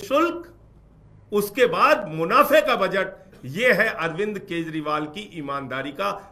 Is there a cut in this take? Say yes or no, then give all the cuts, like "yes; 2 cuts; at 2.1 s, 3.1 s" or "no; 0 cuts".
no; 0 cuts